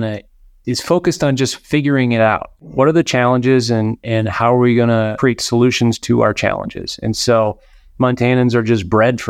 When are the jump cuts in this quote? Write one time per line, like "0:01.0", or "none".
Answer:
0:02.6
0:05.1